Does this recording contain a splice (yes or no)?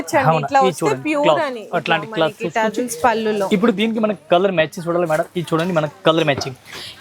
no